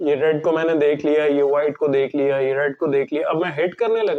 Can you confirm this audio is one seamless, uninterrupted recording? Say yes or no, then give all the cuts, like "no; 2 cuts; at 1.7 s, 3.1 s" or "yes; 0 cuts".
yes; 0 cuts